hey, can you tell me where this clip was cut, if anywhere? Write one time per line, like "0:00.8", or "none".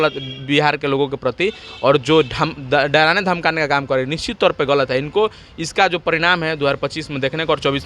none